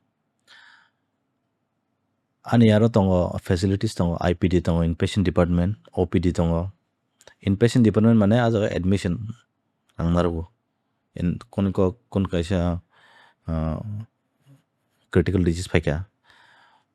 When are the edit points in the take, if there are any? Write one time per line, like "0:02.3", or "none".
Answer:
none